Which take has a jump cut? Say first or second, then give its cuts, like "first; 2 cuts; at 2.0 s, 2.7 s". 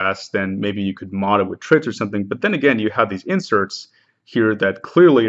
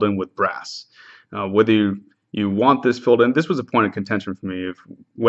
second; 1 cut; at 4.3 s